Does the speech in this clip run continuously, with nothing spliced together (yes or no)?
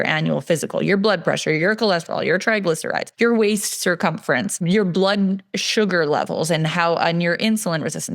no